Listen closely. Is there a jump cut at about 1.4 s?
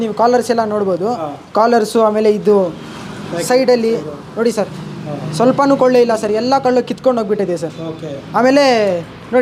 no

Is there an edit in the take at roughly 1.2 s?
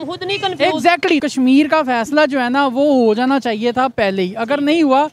yes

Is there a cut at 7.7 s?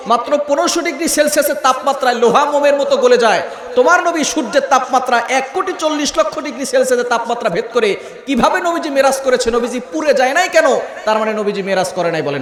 no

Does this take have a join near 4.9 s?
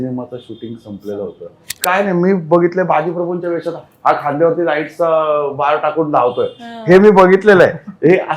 no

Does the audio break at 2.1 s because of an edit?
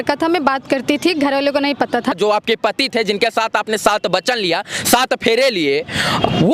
yes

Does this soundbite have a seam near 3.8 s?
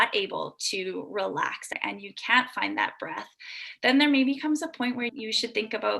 no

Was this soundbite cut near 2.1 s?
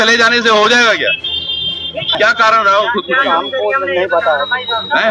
yes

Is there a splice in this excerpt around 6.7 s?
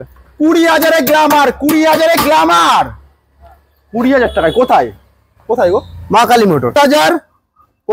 yes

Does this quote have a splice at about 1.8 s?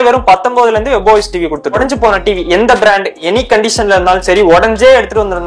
yes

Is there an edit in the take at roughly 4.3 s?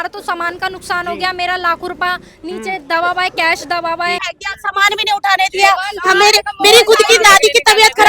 yes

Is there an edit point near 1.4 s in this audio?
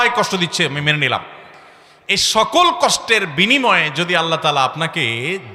no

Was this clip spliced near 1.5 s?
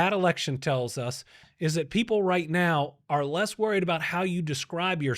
yes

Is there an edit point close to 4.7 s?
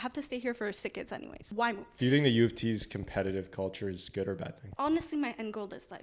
yes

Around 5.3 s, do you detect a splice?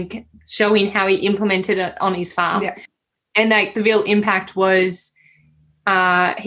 no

